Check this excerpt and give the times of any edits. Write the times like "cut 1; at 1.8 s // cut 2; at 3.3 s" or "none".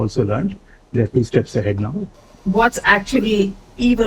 cut 1; at 2.1 s